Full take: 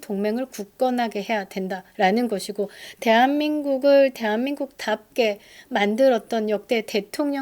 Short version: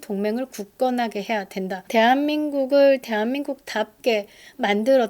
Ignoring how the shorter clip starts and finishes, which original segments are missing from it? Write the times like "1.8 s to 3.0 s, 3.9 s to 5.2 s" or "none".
1.8 s to 2.9 s